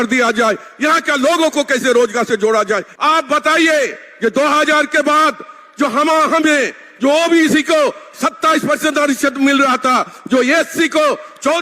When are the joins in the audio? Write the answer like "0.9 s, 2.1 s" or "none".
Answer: 2.9 s